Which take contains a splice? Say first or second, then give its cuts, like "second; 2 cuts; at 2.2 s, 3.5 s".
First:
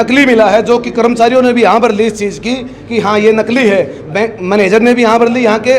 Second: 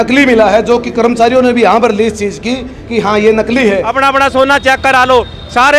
second; 1 cut; at 3.9 s